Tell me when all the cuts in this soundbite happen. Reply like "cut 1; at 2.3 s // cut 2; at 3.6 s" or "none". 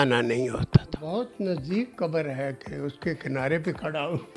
cut 1; at 1.0 s